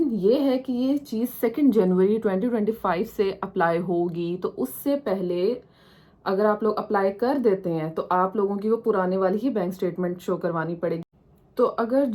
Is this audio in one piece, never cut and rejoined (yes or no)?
yes